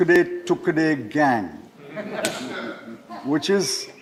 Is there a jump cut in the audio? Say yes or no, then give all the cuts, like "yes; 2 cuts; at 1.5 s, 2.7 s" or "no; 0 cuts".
no; 0 cuts